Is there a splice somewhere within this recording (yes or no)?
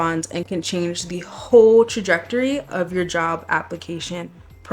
no